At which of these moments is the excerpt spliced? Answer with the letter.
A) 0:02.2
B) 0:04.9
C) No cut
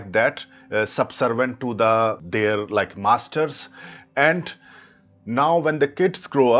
A